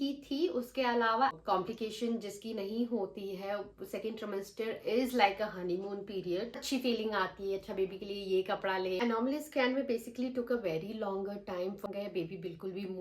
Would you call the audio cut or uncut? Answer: cut